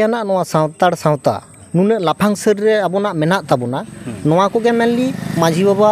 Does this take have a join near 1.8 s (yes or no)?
yes